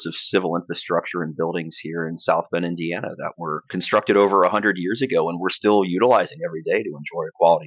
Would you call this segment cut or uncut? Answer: cut